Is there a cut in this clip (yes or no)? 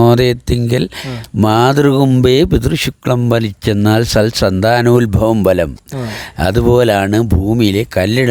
no